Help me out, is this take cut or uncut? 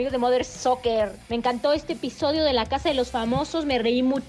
cut